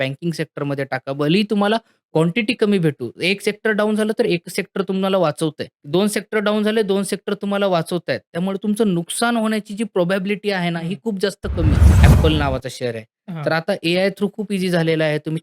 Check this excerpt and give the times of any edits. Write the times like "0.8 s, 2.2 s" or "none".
5.7 s, 11.9 s